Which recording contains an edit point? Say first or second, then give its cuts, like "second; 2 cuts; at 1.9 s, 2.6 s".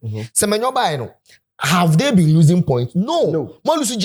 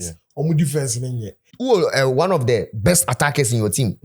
second; 1 cut; at 1.5 s